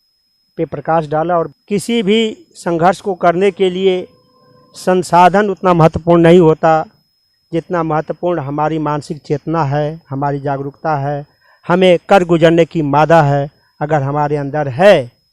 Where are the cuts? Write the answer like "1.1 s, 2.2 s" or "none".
1.6 s